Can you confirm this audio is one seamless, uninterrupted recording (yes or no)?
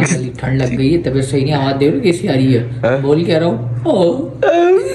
yes